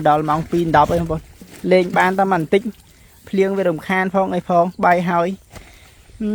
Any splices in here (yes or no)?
no